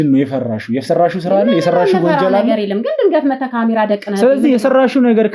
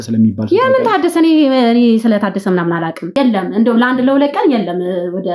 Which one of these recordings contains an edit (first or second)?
second